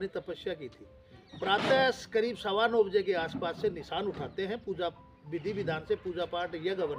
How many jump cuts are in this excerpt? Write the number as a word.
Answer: one